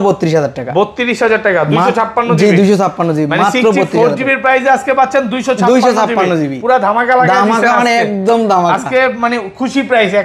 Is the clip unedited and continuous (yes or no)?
yes